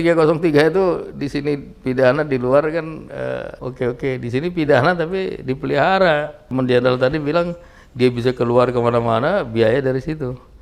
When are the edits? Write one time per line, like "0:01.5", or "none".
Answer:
0:03.6
0:06.5